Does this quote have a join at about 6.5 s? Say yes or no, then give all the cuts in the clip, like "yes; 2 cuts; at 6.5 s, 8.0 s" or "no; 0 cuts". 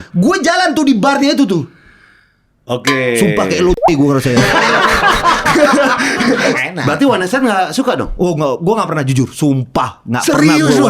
yes; 1 cut; at 6.5 s